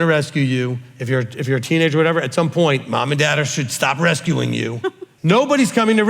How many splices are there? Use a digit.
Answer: 1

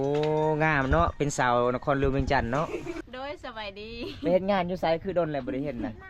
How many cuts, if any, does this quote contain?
1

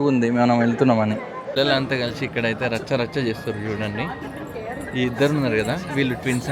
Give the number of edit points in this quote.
1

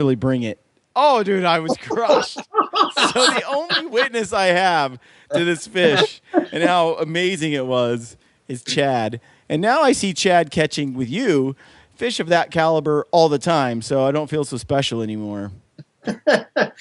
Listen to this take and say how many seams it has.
0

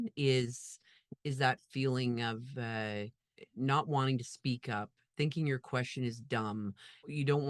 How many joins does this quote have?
0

